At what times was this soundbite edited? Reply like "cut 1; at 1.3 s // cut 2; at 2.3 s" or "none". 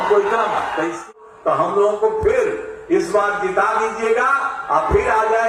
cut 1; at 1.1 s